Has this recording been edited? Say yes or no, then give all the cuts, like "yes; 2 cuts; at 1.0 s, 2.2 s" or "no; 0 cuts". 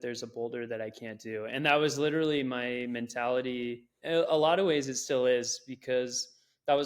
yes; 1 cut; at 3.9 s